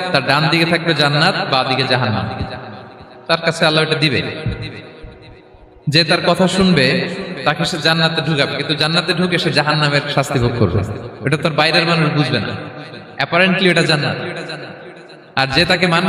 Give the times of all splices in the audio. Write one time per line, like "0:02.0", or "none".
none